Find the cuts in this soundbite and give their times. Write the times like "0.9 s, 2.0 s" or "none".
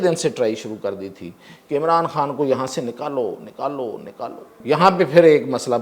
4.6 s